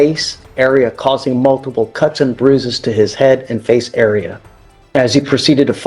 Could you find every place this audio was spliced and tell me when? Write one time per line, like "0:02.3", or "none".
none